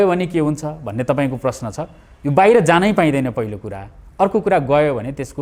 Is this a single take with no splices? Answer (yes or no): yes